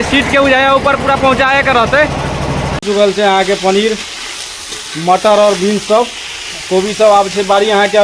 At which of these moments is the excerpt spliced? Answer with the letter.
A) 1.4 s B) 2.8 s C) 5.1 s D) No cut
B